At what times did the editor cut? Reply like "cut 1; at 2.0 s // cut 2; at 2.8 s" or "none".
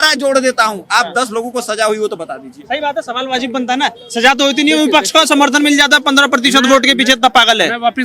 none